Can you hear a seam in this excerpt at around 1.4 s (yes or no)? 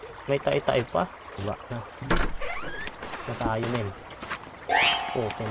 yes